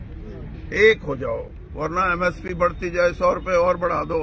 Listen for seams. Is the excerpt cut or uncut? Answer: cut